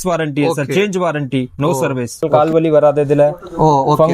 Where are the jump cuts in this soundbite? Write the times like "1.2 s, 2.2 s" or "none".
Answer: 2.3 s